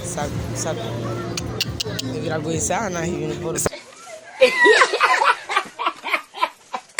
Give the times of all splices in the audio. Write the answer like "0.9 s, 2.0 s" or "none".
none